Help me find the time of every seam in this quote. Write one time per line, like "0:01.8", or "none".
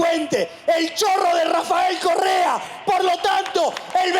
none